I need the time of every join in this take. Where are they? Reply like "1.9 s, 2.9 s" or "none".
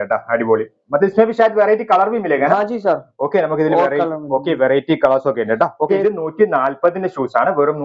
6.0 s